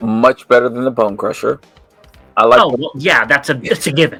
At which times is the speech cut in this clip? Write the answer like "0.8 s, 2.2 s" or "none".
none